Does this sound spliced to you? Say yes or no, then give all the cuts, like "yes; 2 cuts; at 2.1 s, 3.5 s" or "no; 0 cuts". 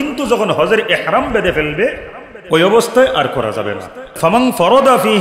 yes; 1 cut; at 4.2 s